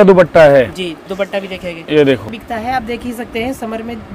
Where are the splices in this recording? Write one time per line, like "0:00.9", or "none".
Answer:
0:02.4